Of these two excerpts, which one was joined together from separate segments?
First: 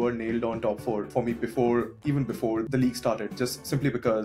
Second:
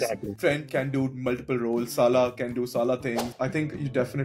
second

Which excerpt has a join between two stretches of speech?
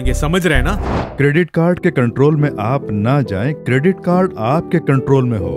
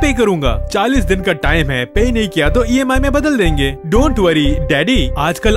first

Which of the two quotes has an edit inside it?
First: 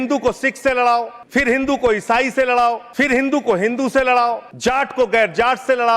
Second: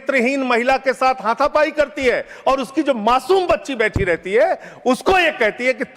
first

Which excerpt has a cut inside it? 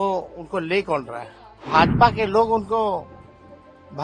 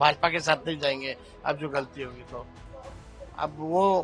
first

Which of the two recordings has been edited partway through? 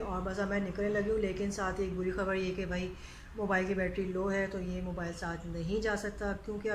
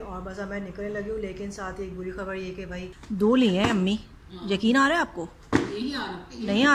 second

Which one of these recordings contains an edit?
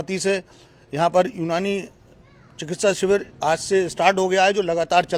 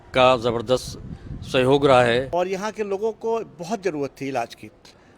second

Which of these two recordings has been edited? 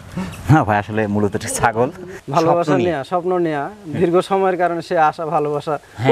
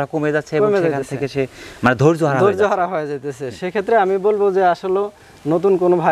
first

